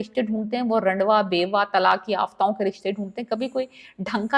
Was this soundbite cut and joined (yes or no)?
no